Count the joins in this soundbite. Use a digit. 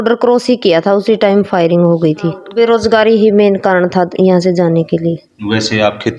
1